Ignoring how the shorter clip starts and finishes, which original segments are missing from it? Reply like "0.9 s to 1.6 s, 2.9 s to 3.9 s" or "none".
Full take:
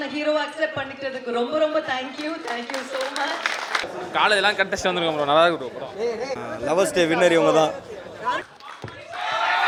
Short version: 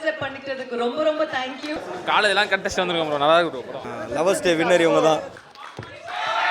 2.4 s to 3.9 s, 5.9 s to 6.3 s, 8.0 s to 8.6 s